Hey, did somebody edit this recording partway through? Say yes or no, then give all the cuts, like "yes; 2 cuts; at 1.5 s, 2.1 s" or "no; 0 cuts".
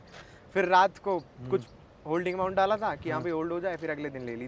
no; 0 cuts